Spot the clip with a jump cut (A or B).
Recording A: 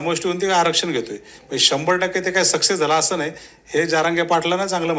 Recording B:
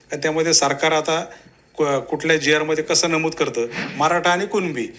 B